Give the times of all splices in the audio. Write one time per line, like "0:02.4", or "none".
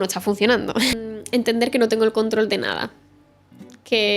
0:00.9